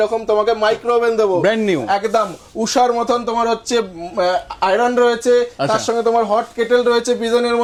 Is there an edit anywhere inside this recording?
no; 0 cuts

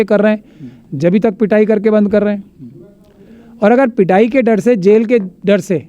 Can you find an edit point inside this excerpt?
no; 0 cuts

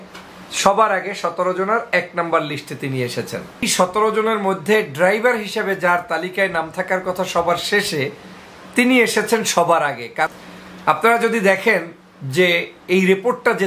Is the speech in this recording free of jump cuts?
no; 2 cuts; at 3.6 s, 10.3 s

